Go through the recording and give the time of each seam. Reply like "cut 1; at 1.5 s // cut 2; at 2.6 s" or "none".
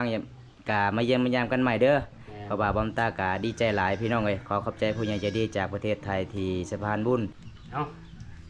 cut 1; at 7.5 s